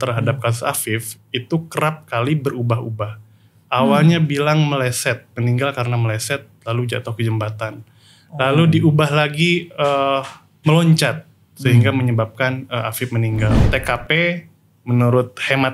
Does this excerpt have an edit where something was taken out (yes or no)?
yes